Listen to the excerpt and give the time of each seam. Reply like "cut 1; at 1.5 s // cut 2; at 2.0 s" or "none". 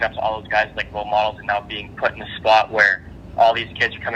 none